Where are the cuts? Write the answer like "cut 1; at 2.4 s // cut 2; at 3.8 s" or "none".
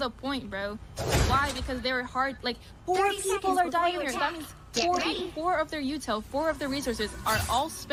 none